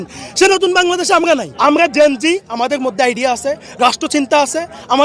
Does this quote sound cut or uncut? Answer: cut